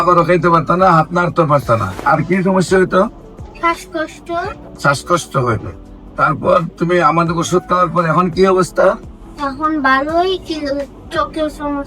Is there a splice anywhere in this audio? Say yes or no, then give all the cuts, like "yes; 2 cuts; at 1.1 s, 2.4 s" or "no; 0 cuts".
yes; 2 cuts; at 2.0 s, 4.6 s